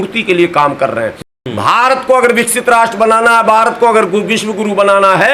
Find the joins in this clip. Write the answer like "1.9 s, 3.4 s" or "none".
none

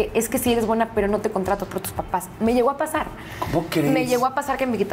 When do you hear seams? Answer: none

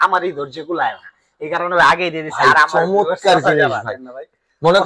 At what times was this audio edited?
none

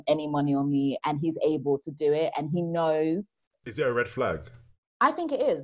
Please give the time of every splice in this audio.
3.6 s

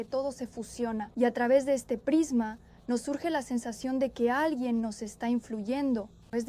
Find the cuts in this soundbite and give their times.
1.1 s

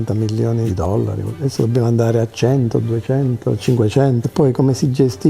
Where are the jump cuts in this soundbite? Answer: 1.3 s

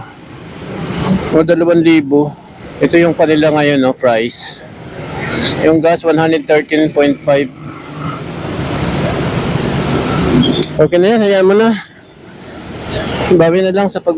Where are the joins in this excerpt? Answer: 2.7 s

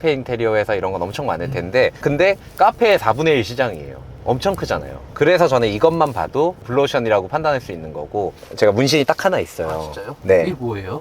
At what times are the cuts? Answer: 8.3 s

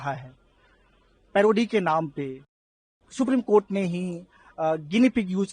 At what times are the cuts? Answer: 2.9 s

